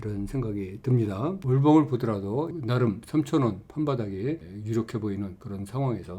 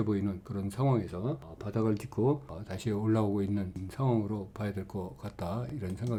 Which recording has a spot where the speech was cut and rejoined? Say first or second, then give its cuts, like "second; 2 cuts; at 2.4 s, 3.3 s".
first; 2 cuts; at 1.4 s, 2.6 s